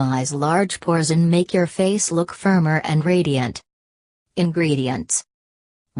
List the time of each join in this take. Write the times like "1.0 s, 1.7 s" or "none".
3.7 s, 4.9 s